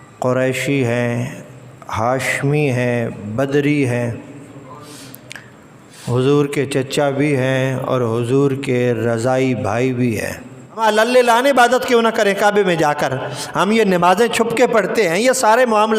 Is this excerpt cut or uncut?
cut